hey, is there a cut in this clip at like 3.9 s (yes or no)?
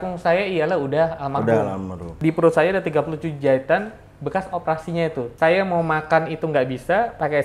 no